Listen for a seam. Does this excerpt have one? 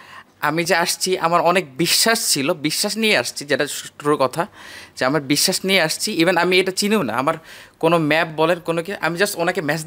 no; 0 cuts

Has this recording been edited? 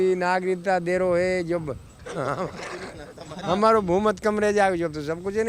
no; 0 cuts

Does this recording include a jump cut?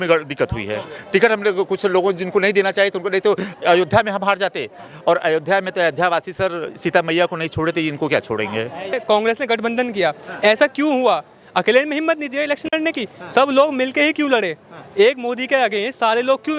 yes; 1 cut; at 8.9 s

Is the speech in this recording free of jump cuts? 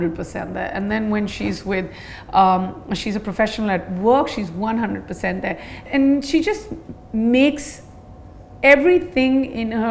no; 1 cut; at 5.8 s

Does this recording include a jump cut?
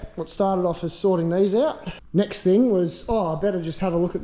yes; 1 cut; at 1.9 s

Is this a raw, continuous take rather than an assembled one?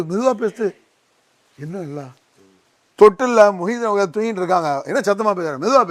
yes; 0 cuts

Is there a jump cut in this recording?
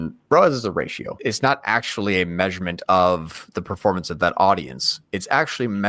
yes; 1 cut; at 1.0 s

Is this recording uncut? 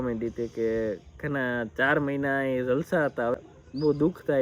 no; 1 cut; at 3.3 s

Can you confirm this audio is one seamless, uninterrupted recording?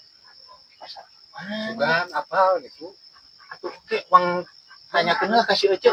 yes; 0 cuts

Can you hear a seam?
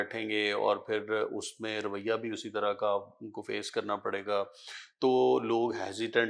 no; 0 cuts

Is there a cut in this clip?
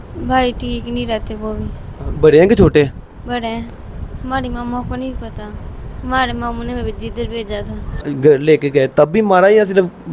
yes; 2 cuts; at 3.7 s, 8.1 s

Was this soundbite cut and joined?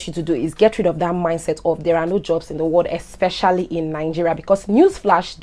no; 0 cuts

